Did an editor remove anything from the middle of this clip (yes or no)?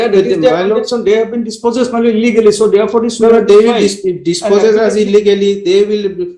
no